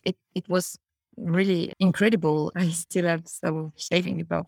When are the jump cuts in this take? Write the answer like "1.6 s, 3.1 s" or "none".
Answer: 1.7 s, 2.5 s